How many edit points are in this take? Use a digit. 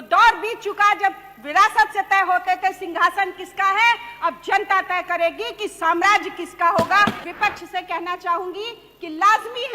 1